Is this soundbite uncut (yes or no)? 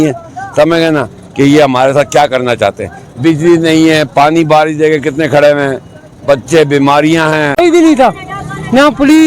no